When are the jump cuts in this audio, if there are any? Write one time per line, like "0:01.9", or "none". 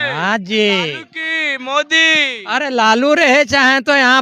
none

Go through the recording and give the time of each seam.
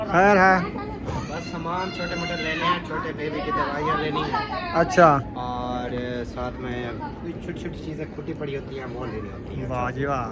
none

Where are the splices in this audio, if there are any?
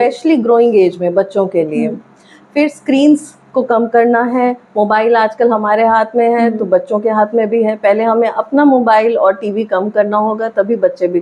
none

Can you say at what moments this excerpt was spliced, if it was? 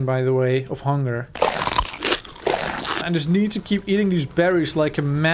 0:02.9

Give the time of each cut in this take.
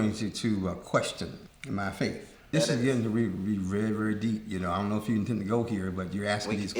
0:01.5
0:02.5

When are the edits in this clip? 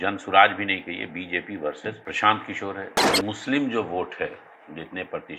0:03.0

